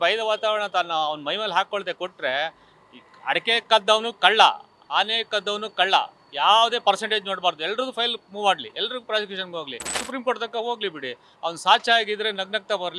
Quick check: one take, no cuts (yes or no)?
no